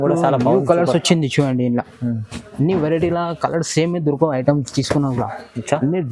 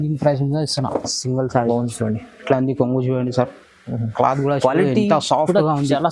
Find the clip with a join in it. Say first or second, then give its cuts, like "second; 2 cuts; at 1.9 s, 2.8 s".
second; 1 cut; at 1.7 s